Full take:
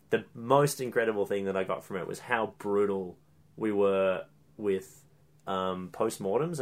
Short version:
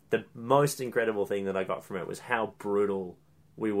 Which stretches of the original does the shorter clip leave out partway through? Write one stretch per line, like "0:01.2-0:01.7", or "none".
none

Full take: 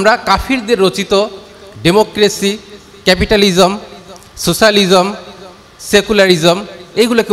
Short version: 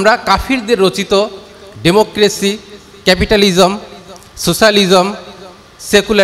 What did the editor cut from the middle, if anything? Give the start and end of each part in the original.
none

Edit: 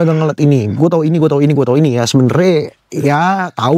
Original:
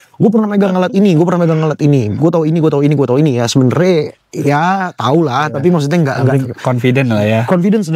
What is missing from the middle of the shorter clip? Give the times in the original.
none

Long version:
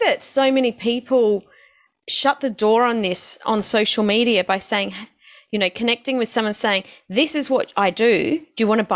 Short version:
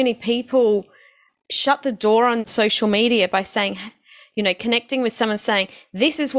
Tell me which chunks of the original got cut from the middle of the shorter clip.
0:03.1-0:03.6

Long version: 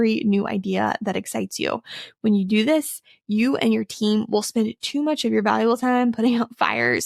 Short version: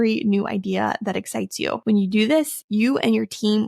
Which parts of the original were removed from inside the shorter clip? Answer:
0:01.8-0:02.2
0:03.0-0:03.2

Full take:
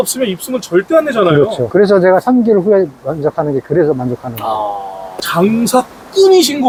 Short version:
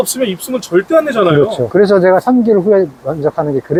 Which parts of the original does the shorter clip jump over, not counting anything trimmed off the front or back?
none

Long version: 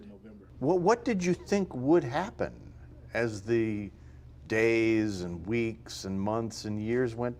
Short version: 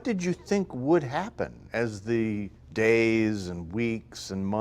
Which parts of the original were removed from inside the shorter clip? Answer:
0:02.6-0:03.0
0:04.0-0:04.3

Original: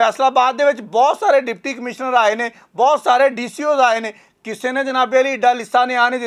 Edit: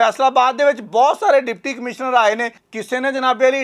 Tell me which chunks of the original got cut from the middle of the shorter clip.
0:02.6-0:04.3

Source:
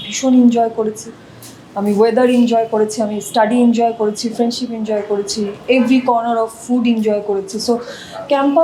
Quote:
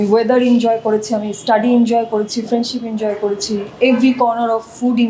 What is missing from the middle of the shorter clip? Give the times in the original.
none

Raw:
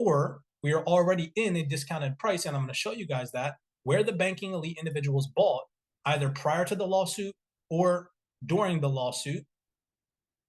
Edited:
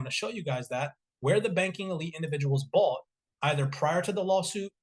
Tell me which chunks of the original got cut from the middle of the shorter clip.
none

